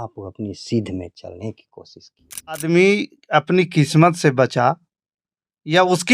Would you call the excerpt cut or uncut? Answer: cut